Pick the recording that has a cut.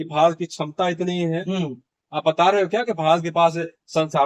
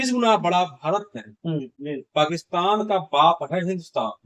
second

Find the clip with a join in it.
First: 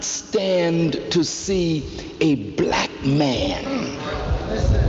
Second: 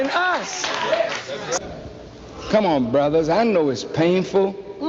second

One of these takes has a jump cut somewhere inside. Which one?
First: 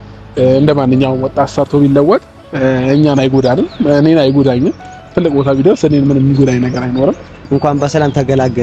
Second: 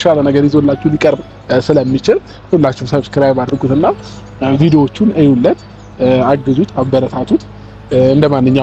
first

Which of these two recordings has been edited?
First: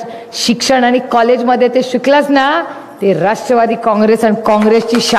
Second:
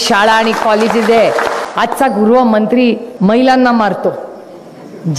second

